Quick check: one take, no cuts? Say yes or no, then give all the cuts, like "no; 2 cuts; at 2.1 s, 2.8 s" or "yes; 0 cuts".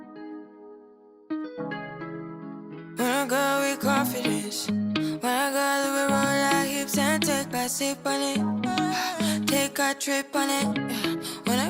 yes; 0 cuts